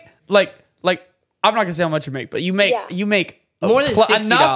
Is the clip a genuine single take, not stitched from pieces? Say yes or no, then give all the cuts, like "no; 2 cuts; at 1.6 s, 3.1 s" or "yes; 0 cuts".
yes; 0 cuts